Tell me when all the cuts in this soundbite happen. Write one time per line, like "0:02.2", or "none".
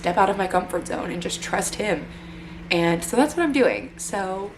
none